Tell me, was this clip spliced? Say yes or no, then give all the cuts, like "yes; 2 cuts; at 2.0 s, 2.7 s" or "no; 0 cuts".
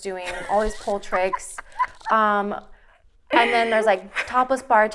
no; 0 cuts